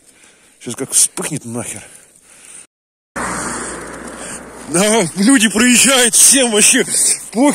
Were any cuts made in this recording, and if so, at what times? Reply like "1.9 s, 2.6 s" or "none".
3.2 s

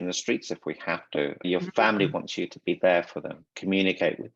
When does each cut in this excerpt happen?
1.4 s

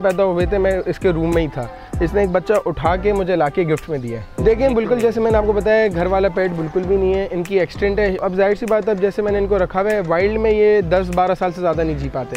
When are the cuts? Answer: 4.3 s, 8.2 s

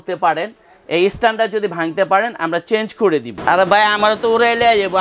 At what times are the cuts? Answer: 3.3 s

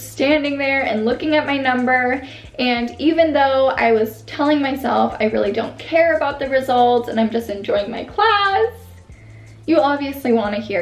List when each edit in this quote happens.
none

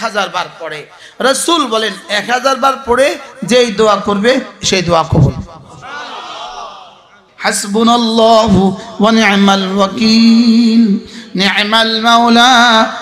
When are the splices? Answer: none

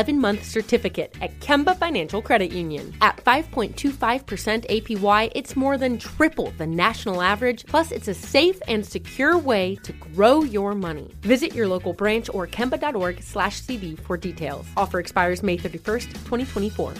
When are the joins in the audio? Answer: none

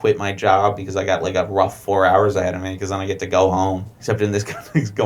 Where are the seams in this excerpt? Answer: 4.0 s

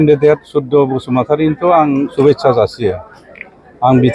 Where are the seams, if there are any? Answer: none

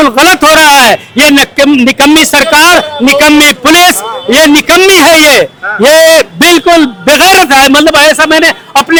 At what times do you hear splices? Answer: none

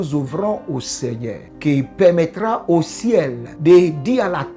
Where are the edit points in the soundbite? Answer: 1.5 s, 3.4 s

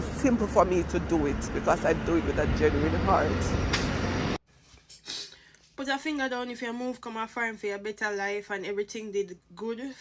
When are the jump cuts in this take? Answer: 4.4 s

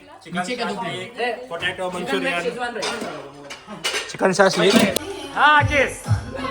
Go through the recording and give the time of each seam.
5.0 s

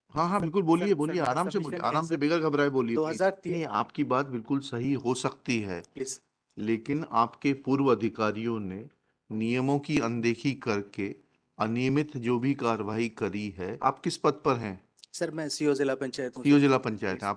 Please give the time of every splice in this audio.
3.4 s, 13.8 s

